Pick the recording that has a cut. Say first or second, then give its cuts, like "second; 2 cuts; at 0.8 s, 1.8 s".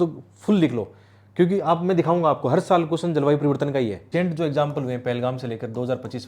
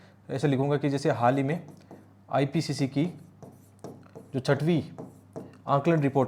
first; 1 cut; at 4.0 s